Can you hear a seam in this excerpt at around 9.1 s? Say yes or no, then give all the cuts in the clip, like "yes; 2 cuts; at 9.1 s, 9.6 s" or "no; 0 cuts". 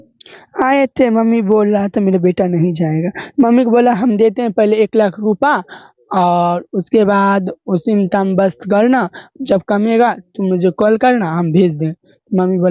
no; 0 cuts